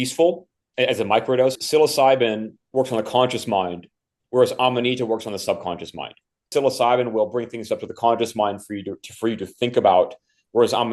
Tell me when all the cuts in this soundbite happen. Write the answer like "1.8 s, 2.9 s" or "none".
1.6 s, 2.6 s, 6.5 s